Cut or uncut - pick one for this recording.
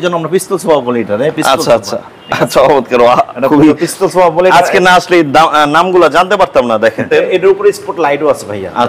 cut